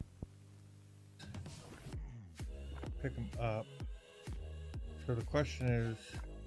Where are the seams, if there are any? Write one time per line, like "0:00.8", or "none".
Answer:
0:01.2